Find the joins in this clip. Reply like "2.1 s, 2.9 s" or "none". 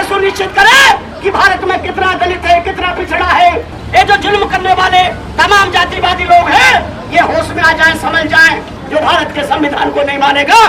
3.8 s, 8.8 s